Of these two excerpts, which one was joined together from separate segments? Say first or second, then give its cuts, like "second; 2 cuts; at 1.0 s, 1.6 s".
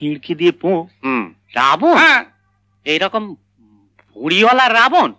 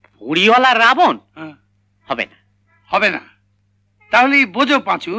first; 1 cut; at 1.4 s